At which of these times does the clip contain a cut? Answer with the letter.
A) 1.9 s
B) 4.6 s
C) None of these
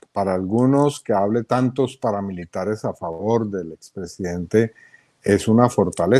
C